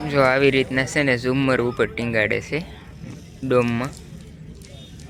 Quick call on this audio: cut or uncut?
uncut